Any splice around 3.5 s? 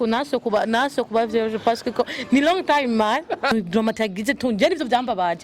yes; 1 cut; at 3.5 s

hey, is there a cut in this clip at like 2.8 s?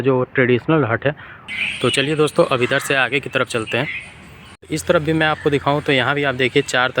no; 2 cuts; at 1.5 s, 4.4 s

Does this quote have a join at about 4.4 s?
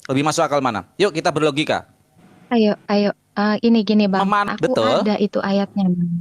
yes; 1 cut; at 4.4 s

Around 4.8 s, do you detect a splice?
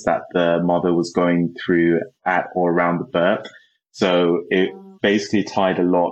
no; 1 cut; at 2.2 s

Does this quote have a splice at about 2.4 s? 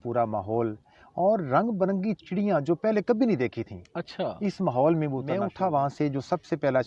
no; 1 cut; at 5.4 s

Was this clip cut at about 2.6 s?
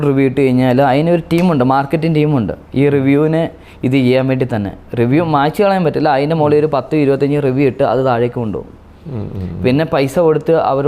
no; 0 cuts

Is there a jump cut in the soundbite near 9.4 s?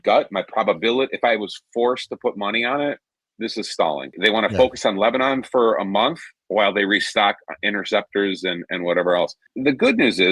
yes; 2 cuts; at 4.2 s, 9.4 s

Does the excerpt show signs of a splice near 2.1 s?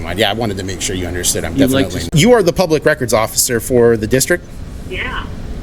yes; 1 cut; at 2.1 s

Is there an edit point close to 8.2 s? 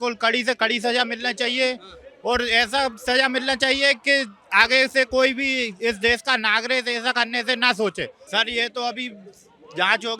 yes; 1 cut; at 8.2 s

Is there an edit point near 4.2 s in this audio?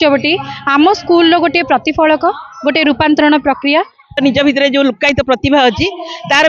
yes; 1 cut; at 4.2 s

